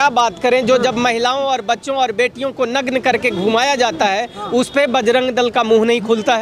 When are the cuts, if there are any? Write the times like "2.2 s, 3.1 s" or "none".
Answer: none